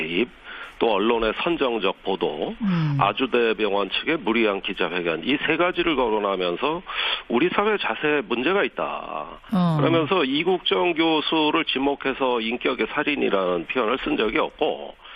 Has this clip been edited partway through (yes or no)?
no